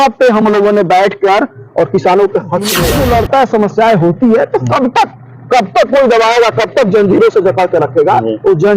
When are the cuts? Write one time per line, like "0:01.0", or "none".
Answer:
0:02.7